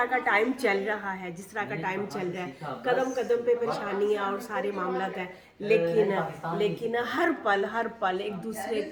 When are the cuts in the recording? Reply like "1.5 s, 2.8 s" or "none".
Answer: none